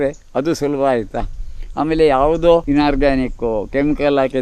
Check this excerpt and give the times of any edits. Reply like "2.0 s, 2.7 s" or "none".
2.6 s

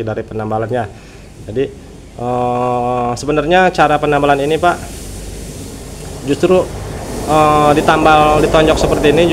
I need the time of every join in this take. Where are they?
none

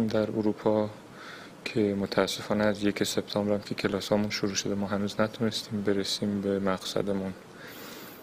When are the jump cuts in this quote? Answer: none

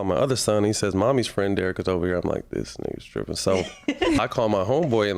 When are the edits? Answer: 4.2 s

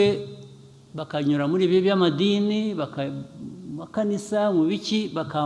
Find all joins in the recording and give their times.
none

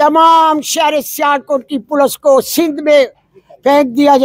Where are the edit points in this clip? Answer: none

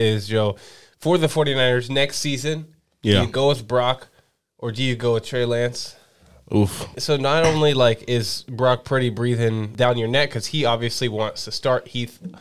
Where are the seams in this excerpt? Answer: 7.0 s, 9.7 s

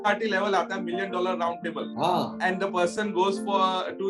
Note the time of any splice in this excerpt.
2.1 s

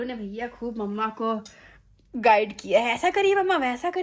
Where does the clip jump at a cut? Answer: none

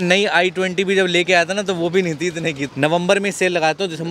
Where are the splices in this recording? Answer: 2.6 s

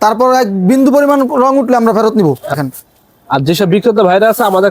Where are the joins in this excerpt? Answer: 2.6 s

